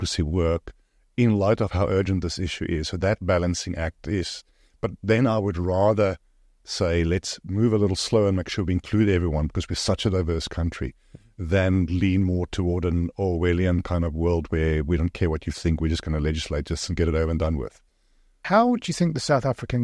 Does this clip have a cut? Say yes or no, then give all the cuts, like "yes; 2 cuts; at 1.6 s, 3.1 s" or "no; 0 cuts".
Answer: no; 0 cuts